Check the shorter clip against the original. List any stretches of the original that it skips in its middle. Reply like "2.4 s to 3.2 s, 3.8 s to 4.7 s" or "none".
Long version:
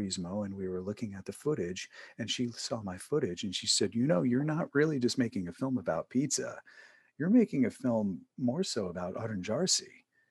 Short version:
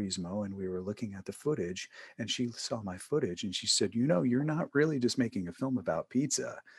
none